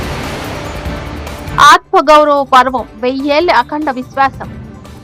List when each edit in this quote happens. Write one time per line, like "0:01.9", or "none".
0:01.5